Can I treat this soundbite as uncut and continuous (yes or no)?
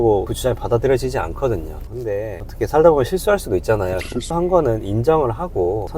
no